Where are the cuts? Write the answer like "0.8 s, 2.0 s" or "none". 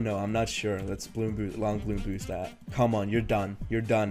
2.6 s